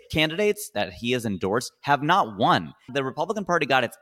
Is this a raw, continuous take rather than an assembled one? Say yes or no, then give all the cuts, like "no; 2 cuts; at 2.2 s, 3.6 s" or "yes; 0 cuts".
no; 1 cut; at 2.8 s